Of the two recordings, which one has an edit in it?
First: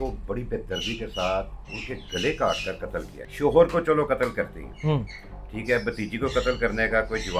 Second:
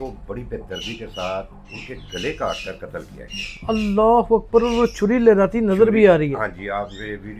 first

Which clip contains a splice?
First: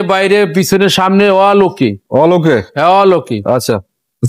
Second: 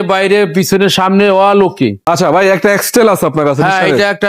second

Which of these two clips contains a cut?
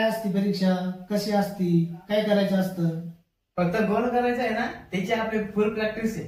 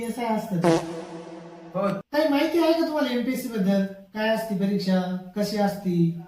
second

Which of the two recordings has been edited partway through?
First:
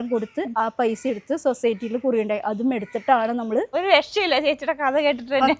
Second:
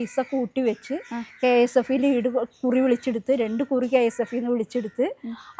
first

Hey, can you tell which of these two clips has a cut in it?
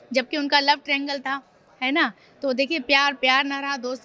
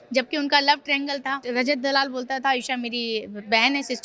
second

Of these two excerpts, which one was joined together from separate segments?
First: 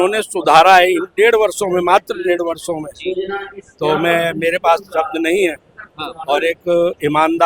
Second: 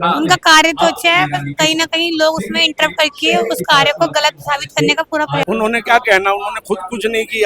second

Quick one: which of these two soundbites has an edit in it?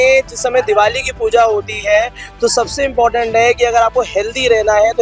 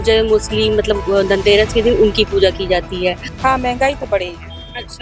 second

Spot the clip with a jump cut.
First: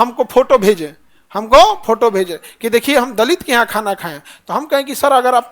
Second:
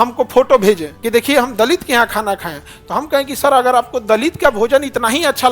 second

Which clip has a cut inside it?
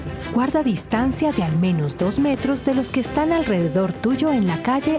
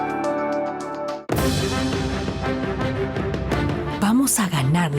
second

